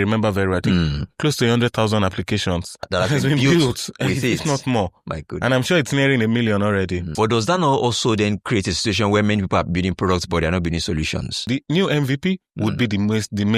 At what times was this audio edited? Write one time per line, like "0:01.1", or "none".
0:02.9
0:07.0
0:11.5